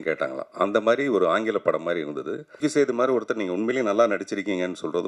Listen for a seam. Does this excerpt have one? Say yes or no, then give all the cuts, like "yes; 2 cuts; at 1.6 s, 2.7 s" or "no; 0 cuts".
yes; 1 cut; at 2.6 s